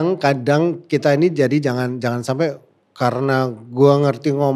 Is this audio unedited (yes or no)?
yes